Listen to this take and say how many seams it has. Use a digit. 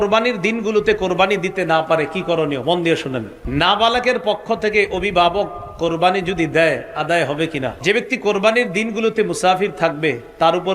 2